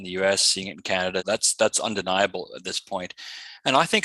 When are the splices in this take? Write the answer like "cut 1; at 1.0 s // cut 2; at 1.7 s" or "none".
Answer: cut 1; at 1.2 s